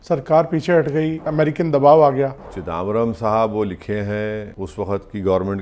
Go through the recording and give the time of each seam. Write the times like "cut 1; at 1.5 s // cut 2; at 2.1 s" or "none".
cut 1; at 1.3 s // cut 2; at 2.6 s // cut 3; at 4.6 s